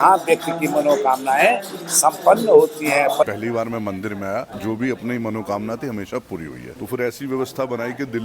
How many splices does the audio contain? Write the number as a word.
three